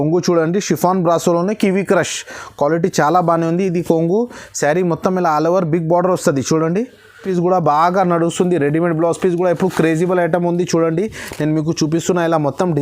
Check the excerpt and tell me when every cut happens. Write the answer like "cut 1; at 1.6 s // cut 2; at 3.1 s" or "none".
cut 1; at 7.2 s